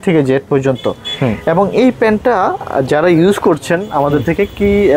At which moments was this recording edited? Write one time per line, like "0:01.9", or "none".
none